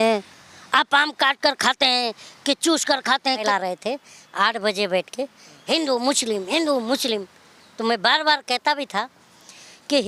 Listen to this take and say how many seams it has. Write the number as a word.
one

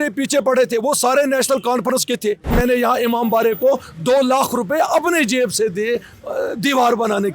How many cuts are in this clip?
one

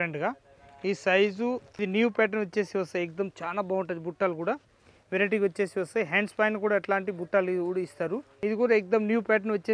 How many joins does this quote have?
two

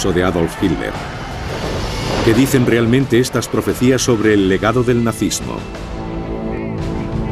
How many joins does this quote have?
one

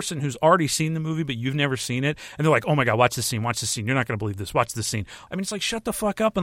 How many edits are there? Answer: one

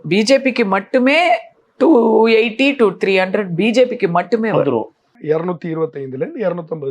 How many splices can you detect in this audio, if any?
one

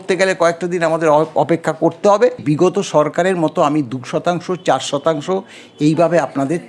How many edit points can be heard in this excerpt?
one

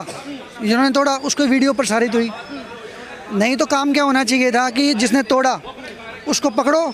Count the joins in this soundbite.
zero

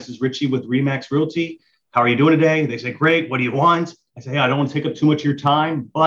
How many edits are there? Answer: zero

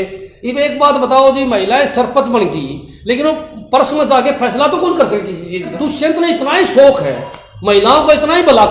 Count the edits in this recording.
one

